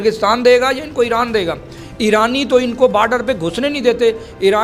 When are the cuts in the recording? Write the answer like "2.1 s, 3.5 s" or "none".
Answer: none